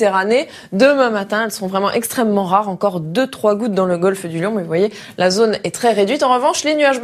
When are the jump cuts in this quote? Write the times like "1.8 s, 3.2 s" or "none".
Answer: 1.9 s

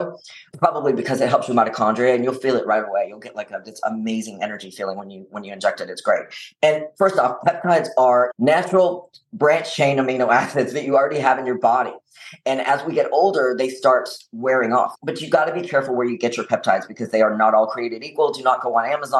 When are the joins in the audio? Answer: 8.3 s, 14.9 s

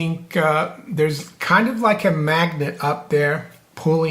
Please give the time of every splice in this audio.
none

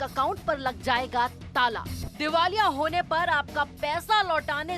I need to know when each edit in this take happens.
2.0 s

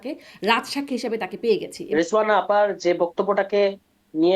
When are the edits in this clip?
1.8 s

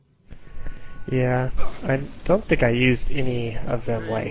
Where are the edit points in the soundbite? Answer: 2.1 s

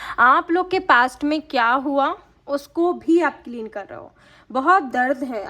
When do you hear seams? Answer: none

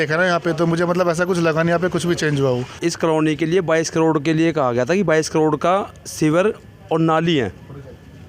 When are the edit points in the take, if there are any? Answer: 2.7 s

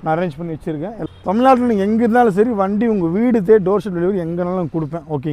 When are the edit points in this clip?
0.9 s

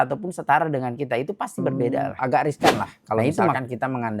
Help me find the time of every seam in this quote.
2.1 s

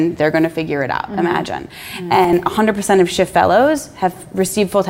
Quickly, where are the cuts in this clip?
none

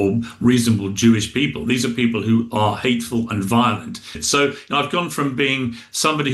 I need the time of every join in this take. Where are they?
4.1 s

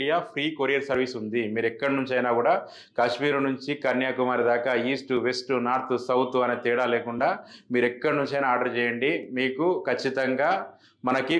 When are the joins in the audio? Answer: none

